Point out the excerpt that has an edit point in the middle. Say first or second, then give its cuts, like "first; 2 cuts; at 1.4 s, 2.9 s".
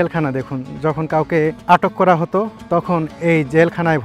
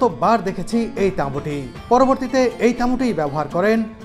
first; 2 cuts; at 1.6 s, 2.6 s